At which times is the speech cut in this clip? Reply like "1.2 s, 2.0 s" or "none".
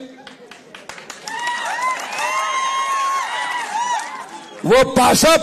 none